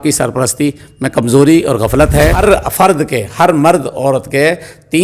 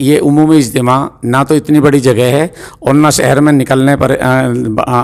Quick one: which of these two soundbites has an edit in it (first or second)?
first